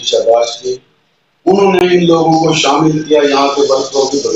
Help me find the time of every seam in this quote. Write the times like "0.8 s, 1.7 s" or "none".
none